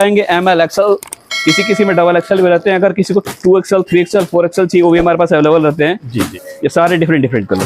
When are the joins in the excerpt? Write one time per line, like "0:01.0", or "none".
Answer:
0:06.4